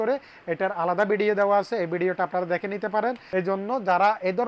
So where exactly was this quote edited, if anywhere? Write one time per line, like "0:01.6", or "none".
0:03.2